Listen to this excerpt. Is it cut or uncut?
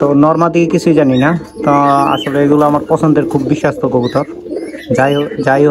uncut